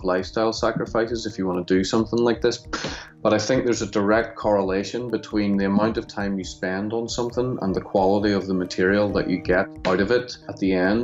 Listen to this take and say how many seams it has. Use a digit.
1